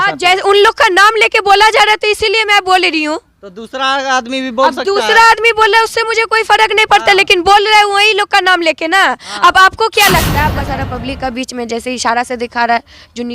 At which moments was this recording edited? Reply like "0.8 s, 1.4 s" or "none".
10.6 s